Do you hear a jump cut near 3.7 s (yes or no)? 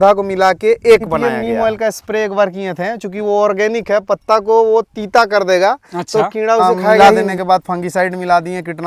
no